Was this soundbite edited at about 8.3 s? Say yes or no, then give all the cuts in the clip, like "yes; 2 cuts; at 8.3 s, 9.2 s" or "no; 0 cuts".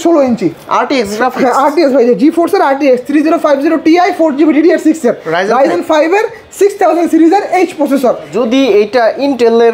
yes; 1 cut; at 8.3 s